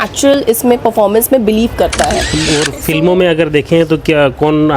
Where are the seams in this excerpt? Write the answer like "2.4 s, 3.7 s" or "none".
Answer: 2.3 s